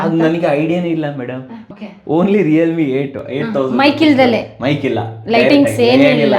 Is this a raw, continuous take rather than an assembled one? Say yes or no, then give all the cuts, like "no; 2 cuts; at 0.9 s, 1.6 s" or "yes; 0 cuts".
no; 1 cut; at 1.6 s